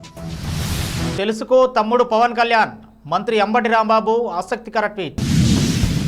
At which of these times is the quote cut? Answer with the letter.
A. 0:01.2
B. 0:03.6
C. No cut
C